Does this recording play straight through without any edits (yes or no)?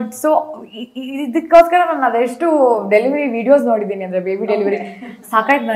yes